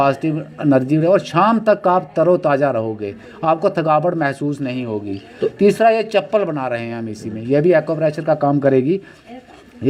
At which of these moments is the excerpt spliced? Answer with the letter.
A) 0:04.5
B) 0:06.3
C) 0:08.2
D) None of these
D